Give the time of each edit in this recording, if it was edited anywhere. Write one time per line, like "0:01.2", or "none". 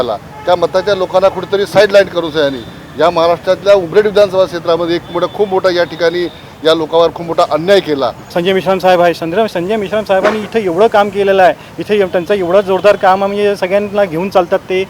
0:08.2